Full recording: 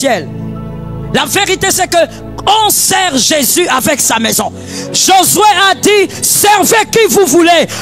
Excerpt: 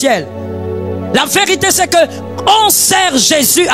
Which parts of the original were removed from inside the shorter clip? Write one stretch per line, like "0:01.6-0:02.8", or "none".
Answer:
none